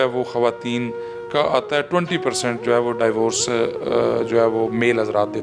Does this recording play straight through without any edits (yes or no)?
yes